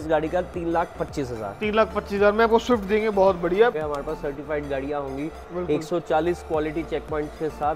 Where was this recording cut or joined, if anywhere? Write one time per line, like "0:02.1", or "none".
0:03.8